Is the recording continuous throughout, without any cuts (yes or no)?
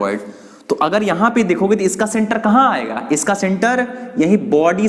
yes